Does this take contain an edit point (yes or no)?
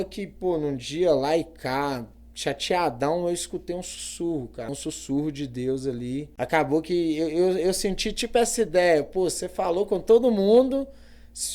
yes